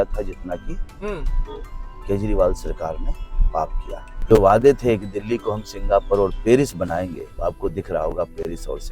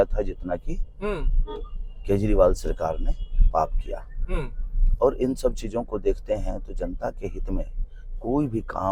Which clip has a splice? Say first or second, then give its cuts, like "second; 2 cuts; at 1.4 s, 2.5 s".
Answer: first; 2 cuts; at 4.1 s, 7.3 s